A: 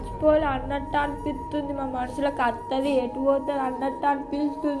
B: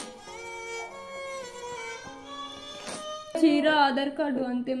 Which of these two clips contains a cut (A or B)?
B